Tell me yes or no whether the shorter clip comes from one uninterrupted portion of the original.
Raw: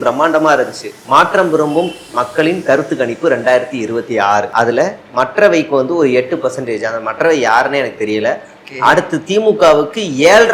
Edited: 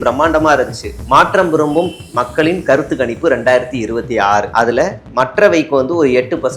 yes